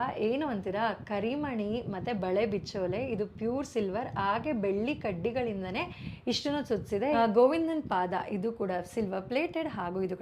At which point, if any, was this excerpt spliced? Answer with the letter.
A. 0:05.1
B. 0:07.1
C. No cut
B